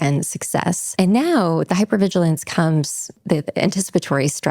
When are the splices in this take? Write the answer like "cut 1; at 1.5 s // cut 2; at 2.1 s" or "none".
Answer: cut 1; at 0.8 s // cut 2; at 3.2 s